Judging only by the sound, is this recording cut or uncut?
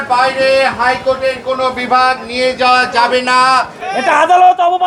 cut